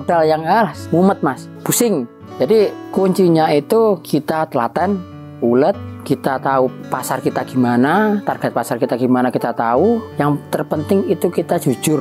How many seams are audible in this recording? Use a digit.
1